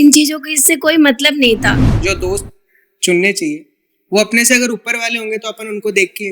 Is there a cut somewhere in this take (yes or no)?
yes